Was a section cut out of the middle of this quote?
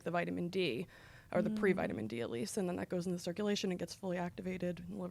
no; 0 cuts

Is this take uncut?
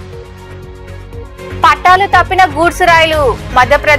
yes; 0 cuts

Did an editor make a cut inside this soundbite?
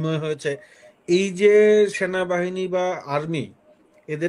no; 0 cuts

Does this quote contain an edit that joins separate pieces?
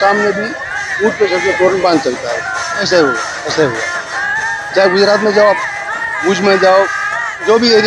yes; 1 cut; at 2.8 s

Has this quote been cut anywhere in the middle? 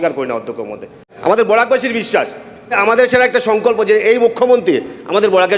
yes; 2 cuts; at 1.0 s, 2.8 s

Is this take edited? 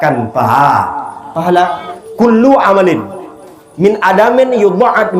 yes; 1 cut; at 1.9 s

